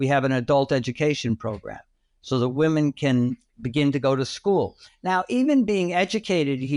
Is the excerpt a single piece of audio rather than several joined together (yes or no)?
no